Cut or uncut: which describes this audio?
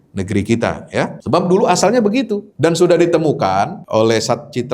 cut